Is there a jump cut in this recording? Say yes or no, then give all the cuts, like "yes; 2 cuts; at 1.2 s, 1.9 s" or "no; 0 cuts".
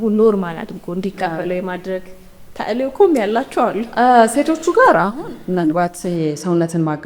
no; 0 cuts